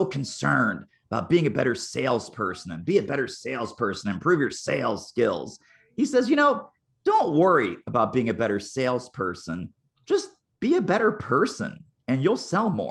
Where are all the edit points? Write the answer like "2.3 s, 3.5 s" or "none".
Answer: none